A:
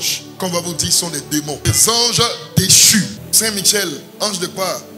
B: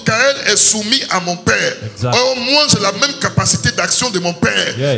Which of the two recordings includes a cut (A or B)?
A